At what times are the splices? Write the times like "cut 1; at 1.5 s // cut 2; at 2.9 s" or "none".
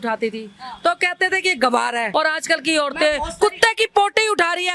cut 1; at 2.1 s